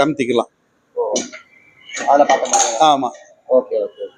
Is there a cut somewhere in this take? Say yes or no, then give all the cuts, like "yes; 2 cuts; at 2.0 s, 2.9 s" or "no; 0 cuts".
no; 0 cuts